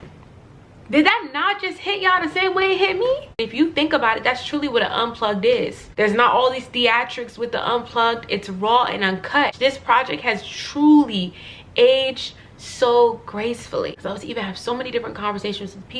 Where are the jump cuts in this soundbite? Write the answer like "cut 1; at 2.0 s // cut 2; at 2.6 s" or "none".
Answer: cut 1; at 3.4 s // cut 2; at 5.8 s // cut 3; at 9.6 s // cut 4; at 14.0 s